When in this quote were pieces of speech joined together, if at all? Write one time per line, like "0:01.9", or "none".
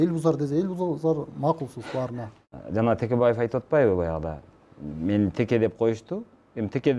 0:02.3